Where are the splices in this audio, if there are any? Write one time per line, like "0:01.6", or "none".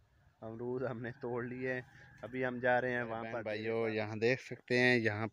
0:03.3